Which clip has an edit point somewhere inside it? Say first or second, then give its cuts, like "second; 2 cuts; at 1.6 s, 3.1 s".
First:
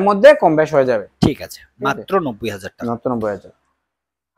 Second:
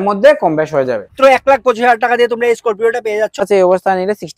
second; 2 cuts; at 1.1 s, 3.4 s